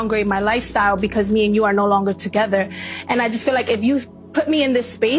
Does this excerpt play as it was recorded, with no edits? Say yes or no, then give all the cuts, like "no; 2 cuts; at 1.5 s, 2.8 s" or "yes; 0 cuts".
yes; 0 cuts